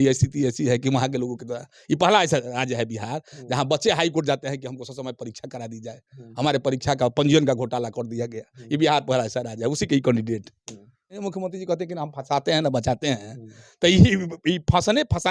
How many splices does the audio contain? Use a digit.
1